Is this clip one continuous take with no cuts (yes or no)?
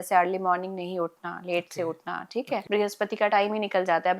no